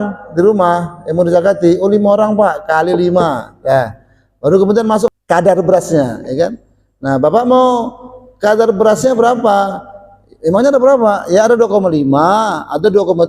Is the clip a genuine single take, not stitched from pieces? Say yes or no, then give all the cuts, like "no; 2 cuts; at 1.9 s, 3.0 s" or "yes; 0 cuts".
no; 1 cut; at 5.1 s